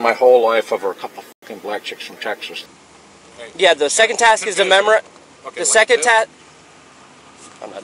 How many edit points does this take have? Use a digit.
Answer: 1